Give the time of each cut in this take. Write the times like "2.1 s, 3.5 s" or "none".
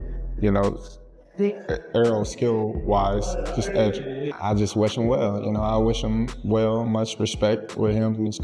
4.3 s